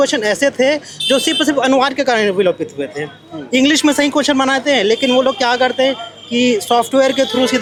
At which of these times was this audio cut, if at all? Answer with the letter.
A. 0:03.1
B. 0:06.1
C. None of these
C